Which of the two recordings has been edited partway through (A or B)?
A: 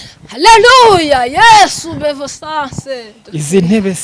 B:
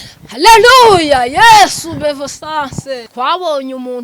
B